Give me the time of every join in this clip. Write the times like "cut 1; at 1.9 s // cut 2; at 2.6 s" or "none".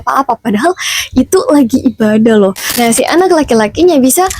cut 1; at 2.7 s